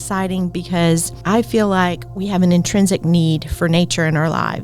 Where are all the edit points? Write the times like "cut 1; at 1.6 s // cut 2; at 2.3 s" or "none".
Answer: cut 1; at 1.1 s